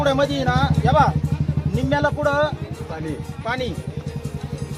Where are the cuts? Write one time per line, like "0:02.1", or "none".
none

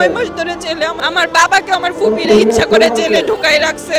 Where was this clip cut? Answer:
0:01.0

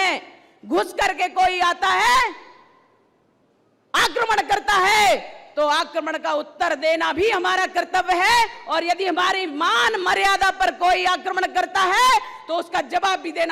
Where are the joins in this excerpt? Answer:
none

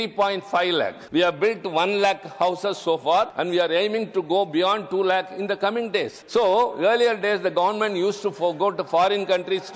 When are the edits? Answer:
0:01.0
0:03.3
0:06.2

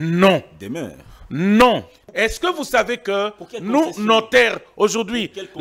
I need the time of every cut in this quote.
0:02.0

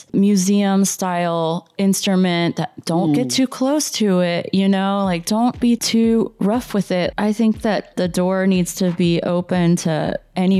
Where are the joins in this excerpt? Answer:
0:05.6
0:07.1

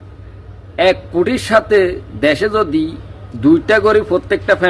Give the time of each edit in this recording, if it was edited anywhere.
none

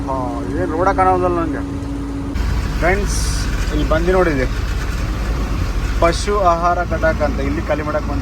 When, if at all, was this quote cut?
0:02.3

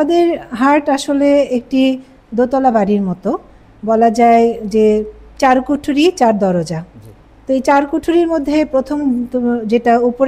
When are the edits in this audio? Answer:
none

